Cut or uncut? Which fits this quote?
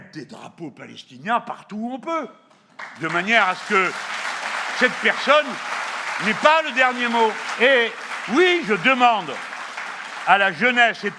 uncut